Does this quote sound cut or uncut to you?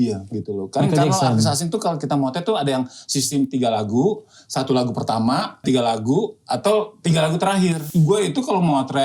cut